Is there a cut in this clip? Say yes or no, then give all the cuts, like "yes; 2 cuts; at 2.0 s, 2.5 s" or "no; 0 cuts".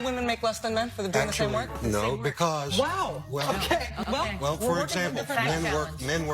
yes; 1 cut; at 1.7 s